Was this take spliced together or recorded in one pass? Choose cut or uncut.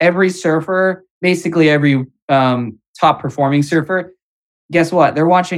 cut